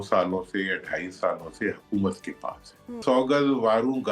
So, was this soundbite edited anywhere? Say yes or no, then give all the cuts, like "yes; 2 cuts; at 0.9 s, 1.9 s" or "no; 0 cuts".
yes; 1 cut; at 3.0 s